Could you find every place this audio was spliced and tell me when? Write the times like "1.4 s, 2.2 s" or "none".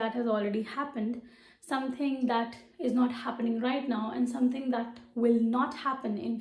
none